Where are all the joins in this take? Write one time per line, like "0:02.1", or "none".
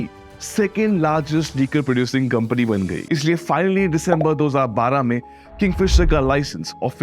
0:03.0